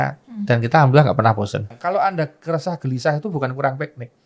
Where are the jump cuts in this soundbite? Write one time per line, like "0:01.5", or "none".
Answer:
0:01.8